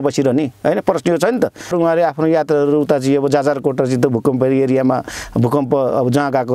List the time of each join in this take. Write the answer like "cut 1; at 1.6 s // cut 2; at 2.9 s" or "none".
cut 1; at 1.7 s